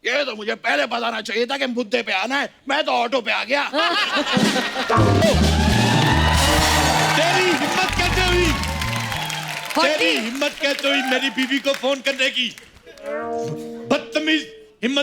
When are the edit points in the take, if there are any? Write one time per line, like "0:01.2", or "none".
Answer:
0:05.2